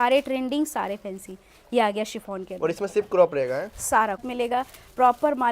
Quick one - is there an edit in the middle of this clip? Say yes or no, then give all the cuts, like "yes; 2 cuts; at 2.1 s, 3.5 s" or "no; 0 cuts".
yes; 1 cut; at 4.3 s